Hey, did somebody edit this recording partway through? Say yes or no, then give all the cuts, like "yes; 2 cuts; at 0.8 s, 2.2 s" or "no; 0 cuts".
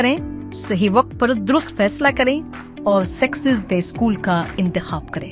no; 0 cuts